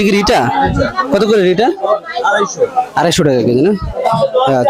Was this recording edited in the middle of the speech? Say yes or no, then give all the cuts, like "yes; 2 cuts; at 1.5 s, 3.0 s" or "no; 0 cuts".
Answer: no; 0 cuts